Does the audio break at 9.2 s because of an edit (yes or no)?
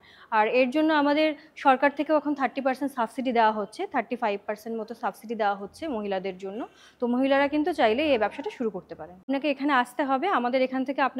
yes